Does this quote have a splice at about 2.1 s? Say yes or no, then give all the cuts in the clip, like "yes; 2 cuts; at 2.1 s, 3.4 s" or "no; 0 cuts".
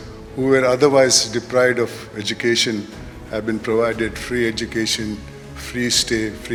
no; 0 cuts